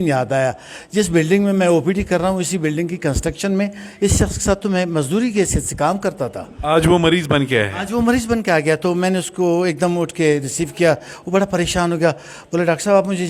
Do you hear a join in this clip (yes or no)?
no